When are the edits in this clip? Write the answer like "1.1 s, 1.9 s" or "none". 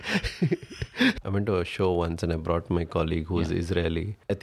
1.2 s